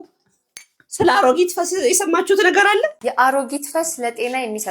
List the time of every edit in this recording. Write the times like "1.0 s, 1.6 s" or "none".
3.0 s